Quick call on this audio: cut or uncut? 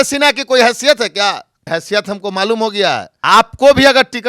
cut